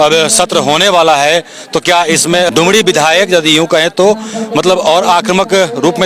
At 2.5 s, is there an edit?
yes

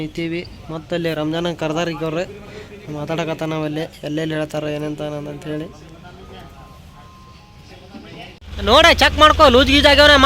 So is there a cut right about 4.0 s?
no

